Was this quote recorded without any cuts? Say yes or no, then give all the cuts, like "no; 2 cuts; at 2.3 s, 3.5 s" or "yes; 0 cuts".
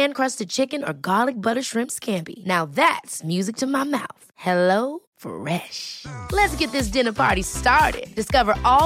yes; 0 cuts